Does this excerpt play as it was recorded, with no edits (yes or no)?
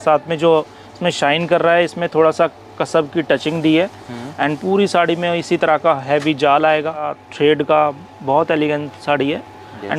no